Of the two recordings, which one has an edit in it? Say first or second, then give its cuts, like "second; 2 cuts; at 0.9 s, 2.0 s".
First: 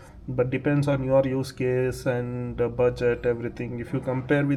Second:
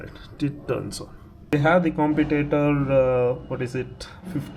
second; 1 cut; at 1.5 s